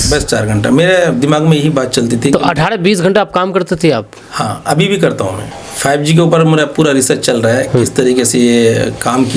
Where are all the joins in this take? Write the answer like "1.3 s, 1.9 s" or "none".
5.4 s